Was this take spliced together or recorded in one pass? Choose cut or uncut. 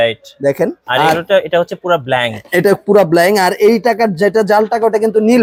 uncut